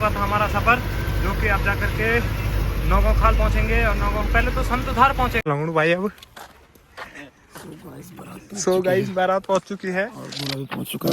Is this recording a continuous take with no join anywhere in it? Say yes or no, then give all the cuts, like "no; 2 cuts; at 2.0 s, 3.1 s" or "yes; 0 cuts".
no; 1 cut; at 5.4 s